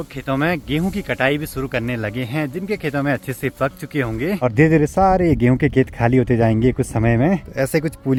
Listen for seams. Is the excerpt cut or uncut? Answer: uncut